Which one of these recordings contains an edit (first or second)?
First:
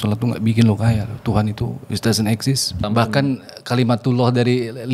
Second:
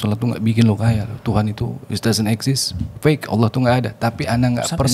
first